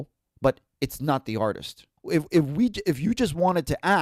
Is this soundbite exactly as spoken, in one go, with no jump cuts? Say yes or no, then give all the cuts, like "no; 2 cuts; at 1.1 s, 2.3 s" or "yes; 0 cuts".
yes; 0 cuts